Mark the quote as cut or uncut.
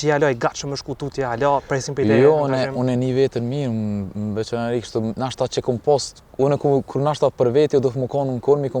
uncut